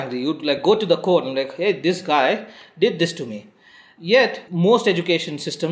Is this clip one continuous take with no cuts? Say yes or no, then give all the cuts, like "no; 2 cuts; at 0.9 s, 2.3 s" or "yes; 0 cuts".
no; 1 cut; at 1.8 s